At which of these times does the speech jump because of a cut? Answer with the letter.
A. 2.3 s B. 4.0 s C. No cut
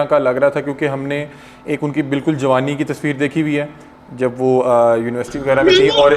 C